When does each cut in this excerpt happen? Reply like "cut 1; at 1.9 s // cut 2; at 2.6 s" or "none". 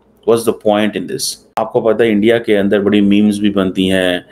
cut 1; at 1.4 s